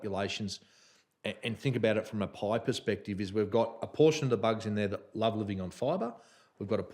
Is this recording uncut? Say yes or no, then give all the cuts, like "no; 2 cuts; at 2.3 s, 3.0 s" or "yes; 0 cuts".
yes; 0 cuts